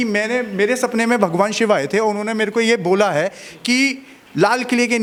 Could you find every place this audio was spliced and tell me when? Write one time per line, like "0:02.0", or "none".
none